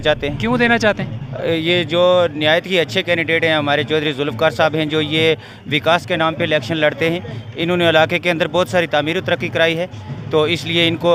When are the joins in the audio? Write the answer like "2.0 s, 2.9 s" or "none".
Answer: none